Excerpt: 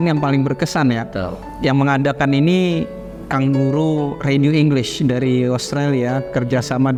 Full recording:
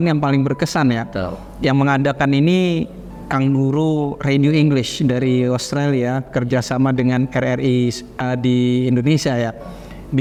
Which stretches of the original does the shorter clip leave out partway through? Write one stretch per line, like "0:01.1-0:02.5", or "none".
none